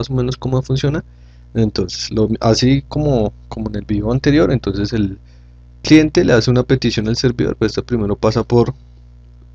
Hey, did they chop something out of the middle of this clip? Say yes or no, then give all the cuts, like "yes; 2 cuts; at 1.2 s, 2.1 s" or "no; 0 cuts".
no; 0 cuts